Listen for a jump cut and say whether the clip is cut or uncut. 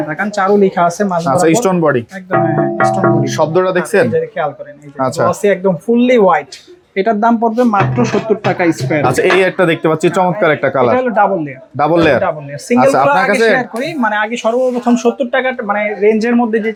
uncut